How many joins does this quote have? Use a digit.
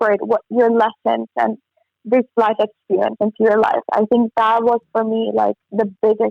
0